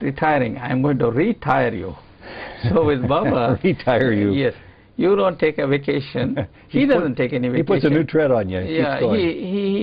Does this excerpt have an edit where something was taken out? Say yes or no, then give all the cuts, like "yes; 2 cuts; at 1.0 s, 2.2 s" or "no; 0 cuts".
no; 0 cuts